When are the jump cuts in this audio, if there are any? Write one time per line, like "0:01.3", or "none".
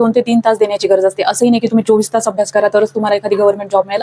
none